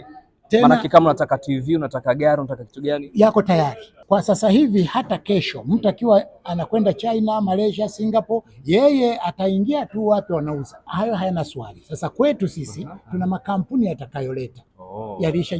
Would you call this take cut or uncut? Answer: cut